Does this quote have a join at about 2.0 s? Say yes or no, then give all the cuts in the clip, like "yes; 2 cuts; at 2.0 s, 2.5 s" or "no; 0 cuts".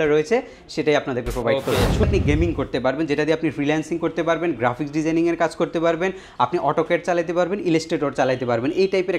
yes; 1 cut; at 2.0 s